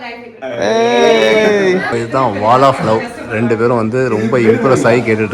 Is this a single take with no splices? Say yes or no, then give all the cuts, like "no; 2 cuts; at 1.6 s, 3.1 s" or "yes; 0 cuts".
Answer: no; 1 cut; at 1.9 s